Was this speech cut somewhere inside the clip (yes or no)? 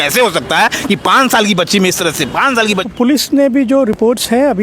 yes